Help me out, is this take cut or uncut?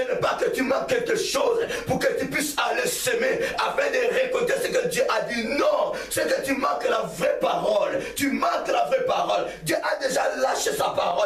uncut